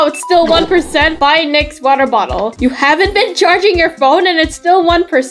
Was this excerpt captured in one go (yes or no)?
yes